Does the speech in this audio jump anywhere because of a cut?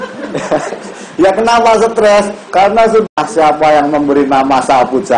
yes; 1 cut; at 3.0 s

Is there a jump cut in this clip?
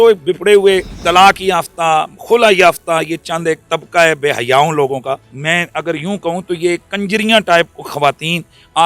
yes; 2 cuts; at 0.9 s, 5.3 s

